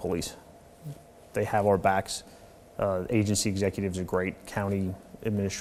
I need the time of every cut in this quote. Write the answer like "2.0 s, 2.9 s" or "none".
none